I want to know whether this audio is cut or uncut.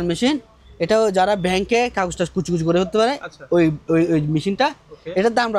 uncut